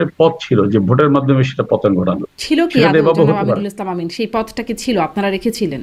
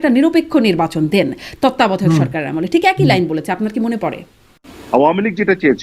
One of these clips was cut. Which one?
second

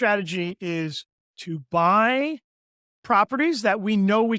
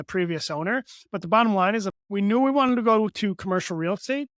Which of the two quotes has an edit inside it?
second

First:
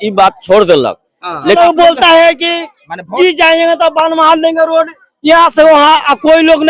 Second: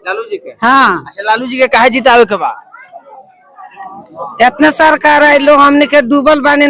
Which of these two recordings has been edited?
first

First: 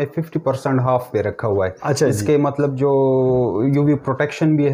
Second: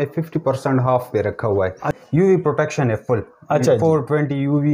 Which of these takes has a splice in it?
second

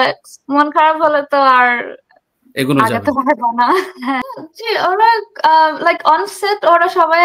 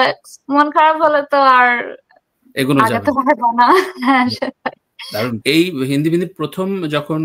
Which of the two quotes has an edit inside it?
first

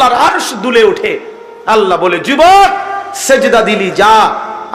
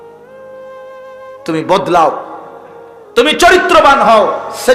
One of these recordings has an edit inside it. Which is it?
second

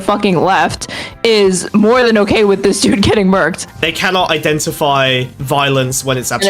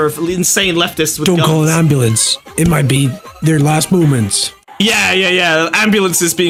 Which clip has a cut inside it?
first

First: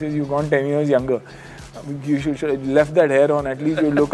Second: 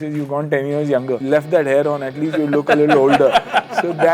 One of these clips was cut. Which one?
second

